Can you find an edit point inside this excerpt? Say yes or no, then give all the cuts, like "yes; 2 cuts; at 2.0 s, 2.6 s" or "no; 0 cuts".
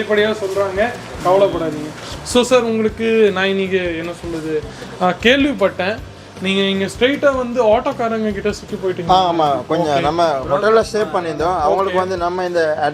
no; 0 cuts